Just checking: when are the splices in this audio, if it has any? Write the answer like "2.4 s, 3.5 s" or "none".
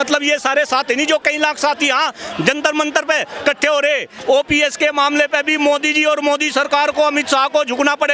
4.1 s

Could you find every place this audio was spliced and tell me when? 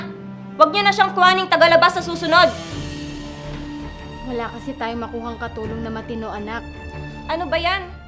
none

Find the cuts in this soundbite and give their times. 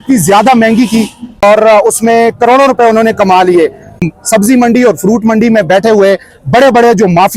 1.4 s, 4.0 s

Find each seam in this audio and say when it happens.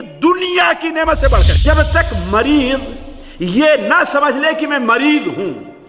1.6 s

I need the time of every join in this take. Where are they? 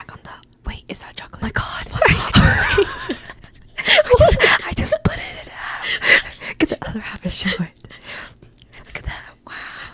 1.2 s

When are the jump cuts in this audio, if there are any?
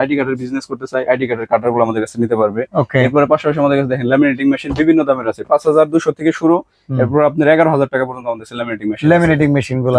none

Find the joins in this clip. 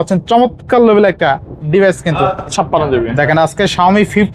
2.5 s

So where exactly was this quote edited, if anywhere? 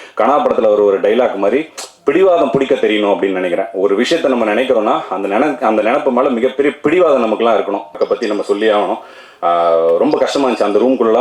8.0 s

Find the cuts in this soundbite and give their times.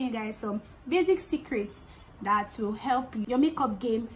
3.2 s

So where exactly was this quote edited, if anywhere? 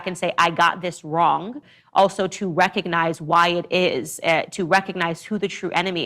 1.7 s

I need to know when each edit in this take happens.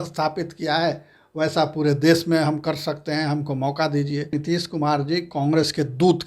4.4 s

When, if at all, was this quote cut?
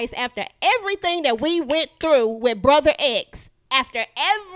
none

